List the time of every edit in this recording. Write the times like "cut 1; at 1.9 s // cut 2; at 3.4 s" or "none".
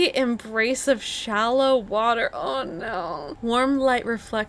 cut 1; at 3.3 s